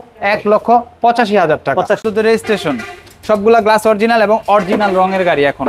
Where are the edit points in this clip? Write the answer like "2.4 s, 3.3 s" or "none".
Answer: 2.0 s